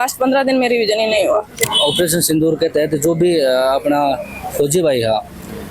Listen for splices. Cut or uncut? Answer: cut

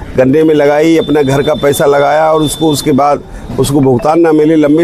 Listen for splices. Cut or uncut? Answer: uncut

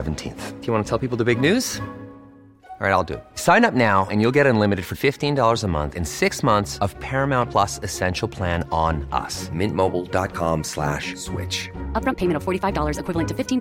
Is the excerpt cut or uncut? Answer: uncut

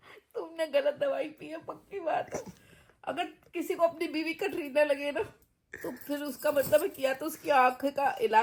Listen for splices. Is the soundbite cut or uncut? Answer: uncut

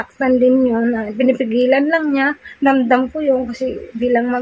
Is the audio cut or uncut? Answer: uncut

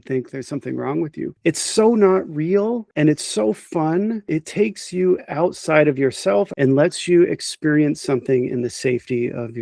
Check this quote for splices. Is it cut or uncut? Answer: cut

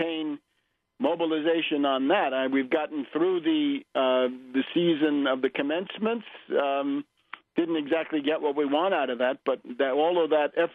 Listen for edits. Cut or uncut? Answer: uncut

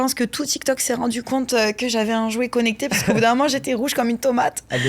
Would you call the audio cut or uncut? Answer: uncut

